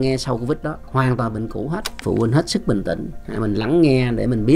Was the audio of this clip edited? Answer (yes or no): yes